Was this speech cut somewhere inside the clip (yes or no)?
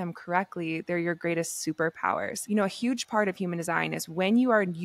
yes